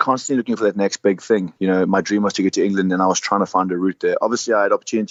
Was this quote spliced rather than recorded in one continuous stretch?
no; 0 cuts

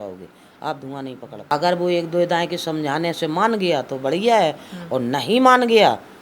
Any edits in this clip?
yes; 1 cut; at 1.5 s

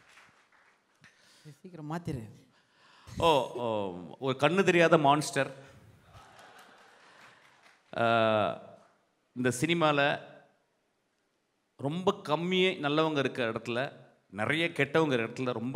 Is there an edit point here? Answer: no; 0 cuts

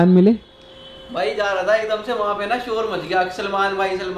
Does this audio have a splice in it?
no; 0 cuts

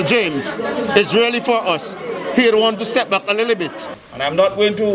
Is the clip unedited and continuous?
no; 1 cut; at 3.9 s

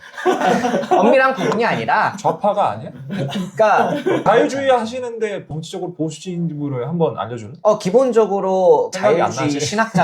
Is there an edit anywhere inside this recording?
yes; 2 cuts; at 4.2 s, 7.4 s

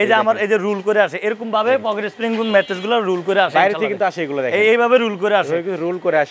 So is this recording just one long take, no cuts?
yes; 0 cuts

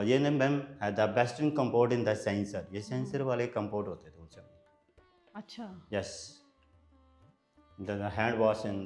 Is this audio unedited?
yes; 0 cuts

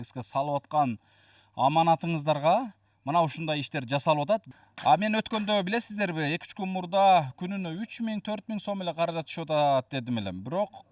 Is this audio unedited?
no; 1 cut; at 4.5 s

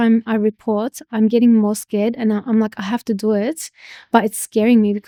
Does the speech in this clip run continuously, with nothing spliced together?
yes; 0 cuts

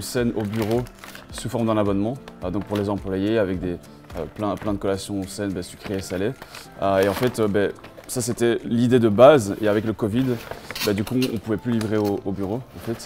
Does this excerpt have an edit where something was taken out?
no; 0 cuts

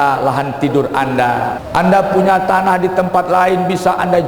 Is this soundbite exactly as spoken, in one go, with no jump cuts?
no; 1 cut; at 1.6 s

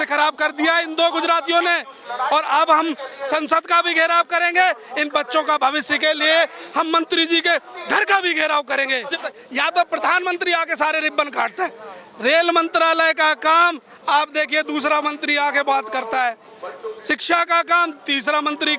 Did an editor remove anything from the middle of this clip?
yes; 1 cut; at 9.2 s

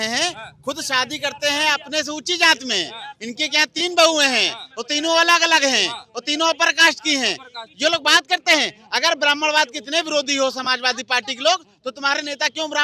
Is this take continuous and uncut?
yes; 0 cuts

